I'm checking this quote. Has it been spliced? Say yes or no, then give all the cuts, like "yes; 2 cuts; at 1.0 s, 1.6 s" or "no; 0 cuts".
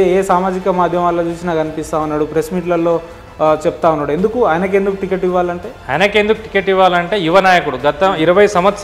yes; 1 cut; at 5.7 s